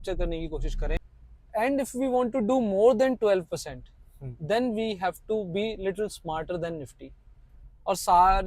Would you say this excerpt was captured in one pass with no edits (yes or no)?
no